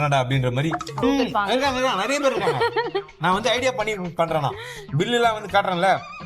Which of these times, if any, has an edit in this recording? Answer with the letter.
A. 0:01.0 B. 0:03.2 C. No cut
A